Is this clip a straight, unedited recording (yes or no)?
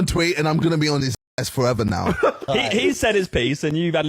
no